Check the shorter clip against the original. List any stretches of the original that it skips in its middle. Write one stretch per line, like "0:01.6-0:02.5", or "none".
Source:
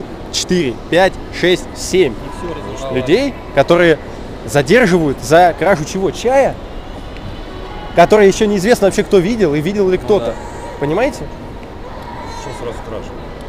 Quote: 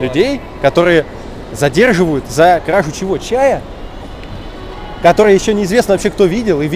none